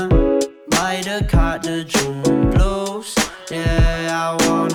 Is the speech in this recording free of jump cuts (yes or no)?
yes